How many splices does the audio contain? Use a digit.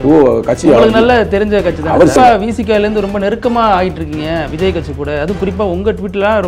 1